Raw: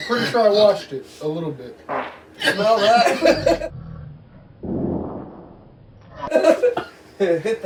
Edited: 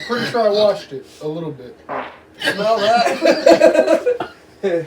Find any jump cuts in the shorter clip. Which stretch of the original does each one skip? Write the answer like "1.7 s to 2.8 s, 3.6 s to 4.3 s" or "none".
3.7 s to 6.3 s